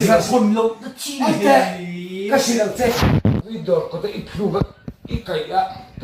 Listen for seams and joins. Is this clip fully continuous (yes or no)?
no